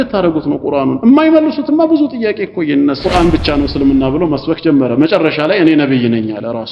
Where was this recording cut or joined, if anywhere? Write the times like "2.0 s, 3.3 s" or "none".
3.0 s